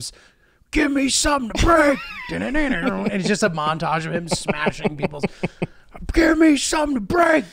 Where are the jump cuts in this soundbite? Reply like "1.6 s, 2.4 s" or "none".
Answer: none